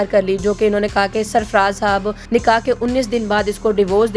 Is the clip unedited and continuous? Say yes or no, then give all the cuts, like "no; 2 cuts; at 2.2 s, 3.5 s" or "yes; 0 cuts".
no; 1 cut; at 2.2 s